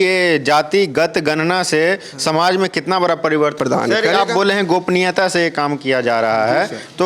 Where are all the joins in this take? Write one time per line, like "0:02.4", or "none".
0:03.6